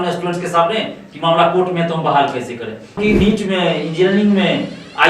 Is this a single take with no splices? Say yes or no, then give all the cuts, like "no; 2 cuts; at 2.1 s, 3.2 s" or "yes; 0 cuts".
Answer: no; 1 cut; at 3.0 s